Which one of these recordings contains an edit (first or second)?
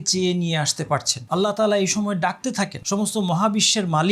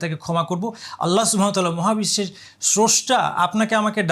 first